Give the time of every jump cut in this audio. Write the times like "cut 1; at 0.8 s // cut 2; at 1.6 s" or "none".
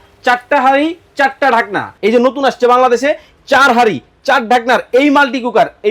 cut 1; at 1.8 s